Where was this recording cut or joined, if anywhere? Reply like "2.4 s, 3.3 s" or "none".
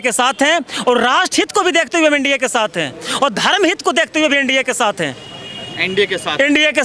none